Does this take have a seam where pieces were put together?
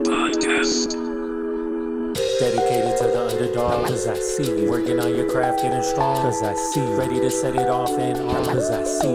no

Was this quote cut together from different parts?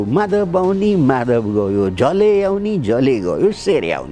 no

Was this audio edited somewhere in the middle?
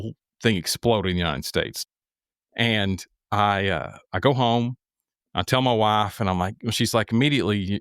yes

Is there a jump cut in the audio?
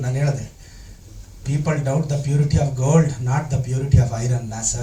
no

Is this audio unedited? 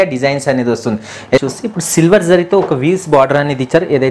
no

